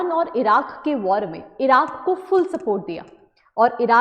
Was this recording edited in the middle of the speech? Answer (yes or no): no